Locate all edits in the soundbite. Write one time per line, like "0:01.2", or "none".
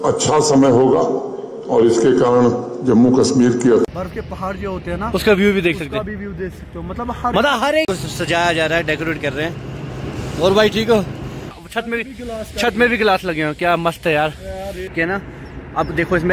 0:03.9
0:07.9
0:11.5
0:14.9

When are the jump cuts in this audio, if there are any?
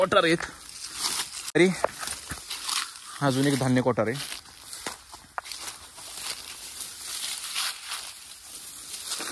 0:01.5

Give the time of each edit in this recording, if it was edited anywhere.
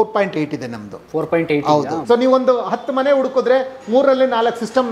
0:02.0

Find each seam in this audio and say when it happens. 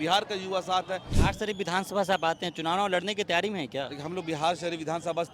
0:01.1

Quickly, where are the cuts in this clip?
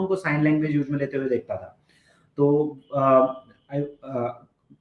none

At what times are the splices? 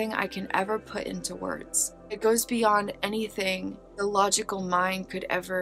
0:02.2
0:03.8

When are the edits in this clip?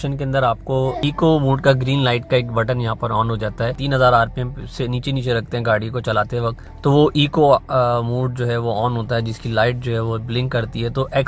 0:01.0
0:03.8
0:06.7

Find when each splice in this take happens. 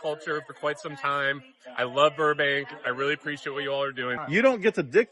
0:04.1

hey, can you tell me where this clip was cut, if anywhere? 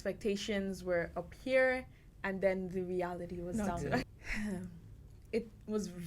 0:04.1

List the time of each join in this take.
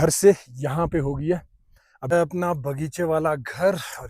0:02.1

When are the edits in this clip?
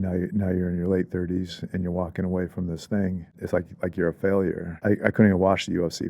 0:03.4
0:04.7

